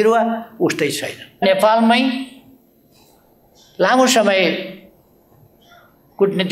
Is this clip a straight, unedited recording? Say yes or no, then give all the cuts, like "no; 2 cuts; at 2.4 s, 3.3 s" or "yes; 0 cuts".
no; 1 cut; at 1.4 s